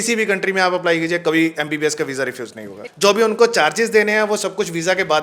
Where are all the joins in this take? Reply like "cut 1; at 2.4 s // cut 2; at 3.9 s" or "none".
cut 1; at 2.8 s